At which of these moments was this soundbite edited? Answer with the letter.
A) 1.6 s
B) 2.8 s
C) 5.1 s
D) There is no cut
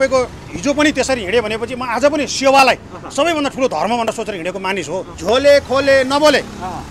C